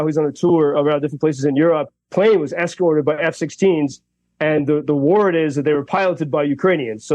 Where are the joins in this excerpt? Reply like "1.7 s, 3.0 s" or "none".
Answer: 2.1 s